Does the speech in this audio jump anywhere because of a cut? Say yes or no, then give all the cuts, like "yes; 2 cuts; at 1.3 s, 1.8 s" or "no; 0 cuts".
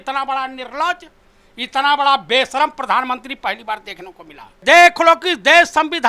yes; 1 cut; at 4.5 s